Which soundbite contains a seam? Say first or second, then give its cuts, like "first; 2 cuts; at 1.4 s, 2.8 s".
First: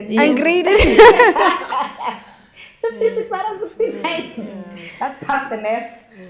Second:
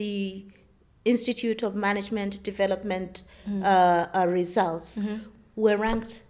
second; 1 cut; at 5.2 s